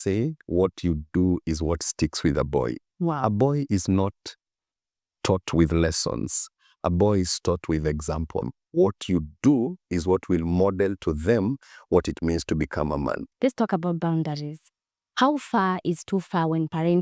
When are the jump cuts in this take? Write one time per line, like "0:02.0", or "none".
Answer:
0:08.6
0:13.3